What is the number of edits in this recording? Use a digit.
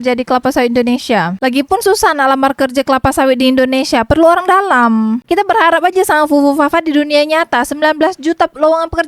1